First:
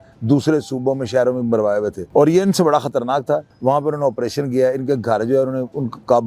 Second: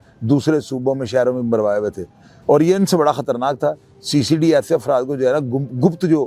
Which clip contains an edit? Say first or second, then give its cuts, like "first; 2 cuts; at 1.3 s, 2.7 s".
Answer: first; 2 cuts; at 2.0 s, 3.5 s